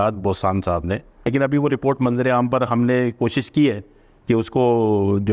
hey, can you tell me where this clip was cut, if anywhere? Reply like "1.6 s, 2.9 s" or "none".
1.3 s